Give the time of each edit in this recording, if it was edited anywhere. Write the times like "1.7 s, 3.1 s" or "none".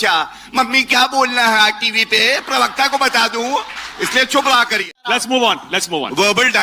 3.8 s, 5.1 s